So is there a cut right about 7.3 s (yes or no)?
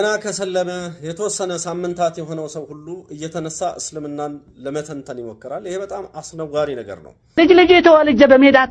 yes